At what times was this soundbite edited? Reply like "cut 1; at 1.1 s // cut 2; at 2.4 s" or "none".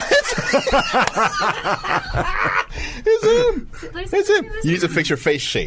none